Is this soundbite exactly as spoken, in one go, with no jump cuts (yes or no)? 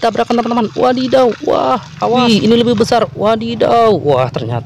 no